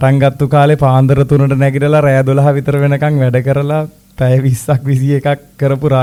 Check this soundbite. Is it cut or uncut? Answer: uncut